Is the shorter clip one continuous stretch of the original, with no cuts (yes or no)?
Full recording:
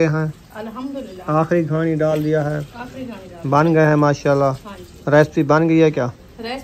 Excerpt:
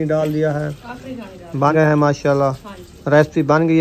no